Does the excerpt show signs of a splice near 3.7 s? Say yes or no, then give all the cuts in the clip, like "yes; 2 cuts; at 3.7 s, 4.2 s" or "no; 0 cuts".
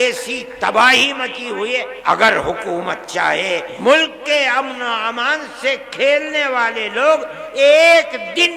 yes; 2 cuts; at 1.9 s, 3.7 s